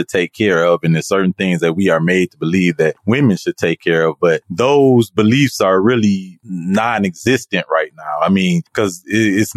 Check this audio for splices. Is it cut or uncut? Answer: cut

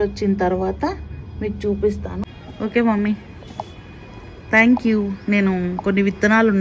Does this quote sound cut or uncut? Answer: cut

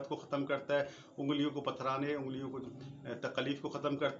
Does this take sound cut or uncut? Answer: uncut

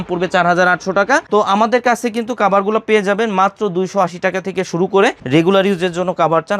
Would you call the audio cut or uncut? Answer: cut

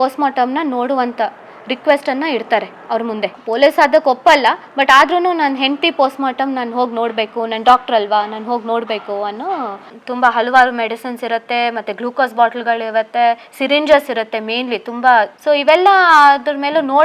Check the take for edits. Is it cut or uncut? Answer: cut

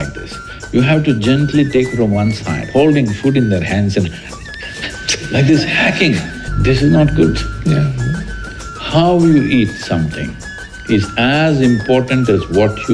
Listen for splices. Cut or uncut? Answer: cut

